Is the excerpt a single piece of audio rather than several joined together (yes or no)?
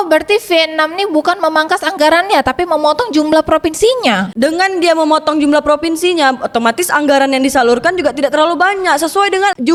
yes